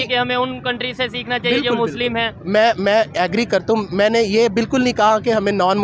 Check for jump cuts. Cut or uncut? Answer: uncut